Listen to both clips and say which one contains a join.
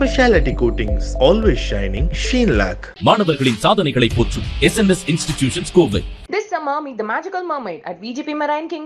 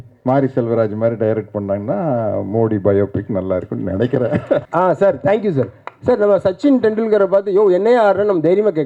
second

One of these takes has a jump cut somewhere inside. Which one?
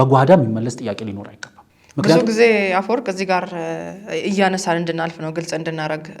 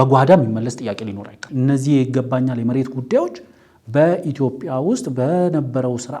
second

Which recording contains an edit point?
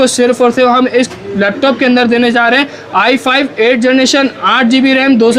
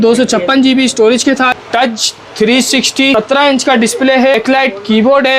second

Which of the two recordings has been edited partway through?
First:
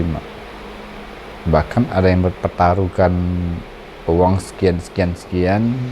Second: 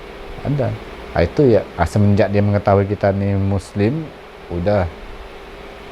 first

